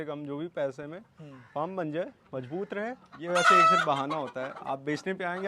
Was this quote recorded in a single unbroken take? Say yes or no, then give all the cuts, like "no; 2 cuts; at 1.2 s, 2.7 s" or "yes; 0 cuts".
no; 1 cut; at 3.1 s